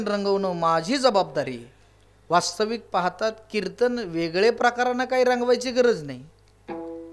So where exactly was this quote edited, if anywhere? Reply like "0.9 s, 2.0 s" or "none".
none